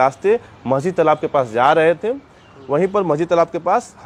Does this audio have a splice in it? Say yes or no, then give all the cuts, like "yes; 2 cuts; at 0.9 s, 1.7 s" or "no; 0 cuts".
no; 0 cuts